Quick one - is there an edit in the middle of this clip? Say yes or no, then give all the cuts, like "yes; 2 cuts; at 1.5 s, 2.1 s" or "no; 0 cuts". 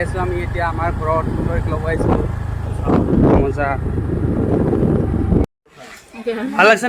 yes; 1 cut; at 5.6 s